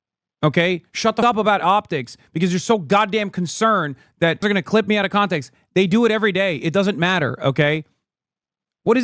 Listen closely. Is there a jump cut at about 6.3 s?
no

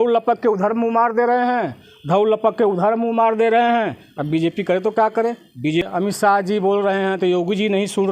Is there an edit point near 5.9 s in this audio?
yes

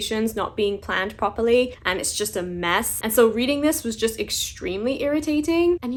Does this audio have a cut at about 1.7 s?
no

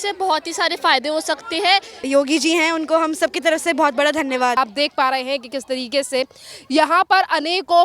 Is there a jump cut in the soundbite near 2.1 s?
yes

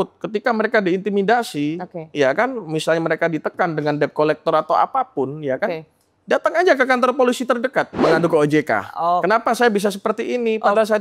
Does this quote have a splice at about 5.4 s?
no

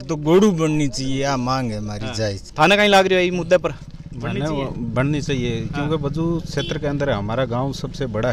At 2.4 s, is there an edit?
no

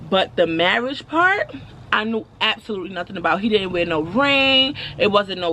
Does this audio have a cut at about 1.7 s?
yes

